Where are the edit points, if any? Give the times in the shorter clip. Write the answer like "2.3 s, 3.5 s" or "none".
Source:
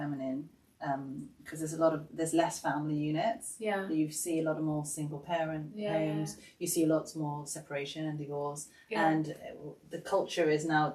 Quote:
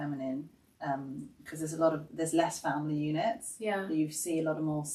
none